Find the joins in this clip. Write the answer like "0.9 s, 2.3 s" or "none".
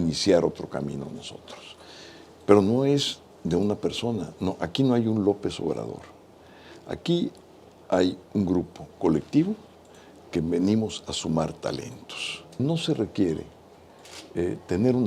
12.6 s